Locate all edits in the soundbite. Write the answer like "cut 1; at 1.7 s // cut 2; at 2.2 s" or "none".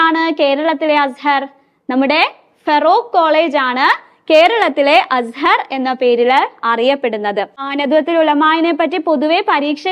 cut 1; at 7.7 s